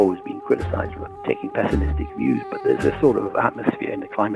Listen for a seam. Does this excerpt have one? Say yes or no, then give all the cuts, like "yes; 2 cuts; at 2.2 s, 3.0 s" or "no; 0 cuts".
yes; 1 cut; at 1.0 s